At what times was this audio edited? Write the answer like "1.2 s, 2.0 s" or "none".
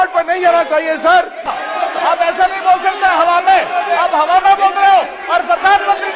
1.5 s